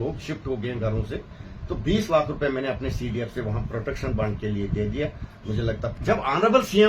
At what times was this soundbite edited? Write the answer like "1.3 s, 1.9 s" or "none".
6.0 s